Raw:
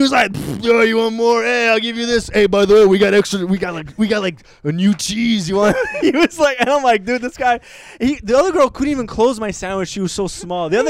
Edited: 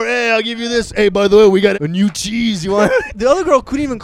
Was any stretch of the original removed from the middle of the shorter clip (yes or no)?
yes